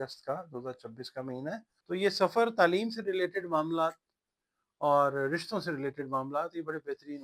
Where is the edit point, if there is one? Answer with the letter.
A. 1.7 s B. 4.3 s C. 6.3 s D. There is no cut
A